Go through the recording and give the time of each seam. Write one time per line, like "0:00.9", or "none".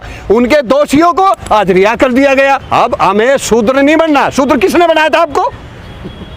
0:02.6